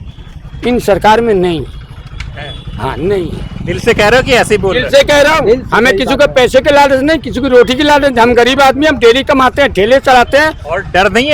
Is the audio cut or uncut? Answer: uncut